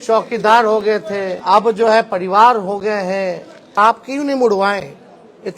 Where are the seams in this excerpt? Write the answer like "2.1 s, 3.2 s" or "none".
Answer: 1.4 s, 3.6 s